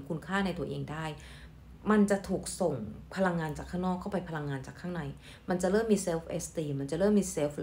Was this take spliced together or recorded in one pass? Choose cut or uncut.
uncut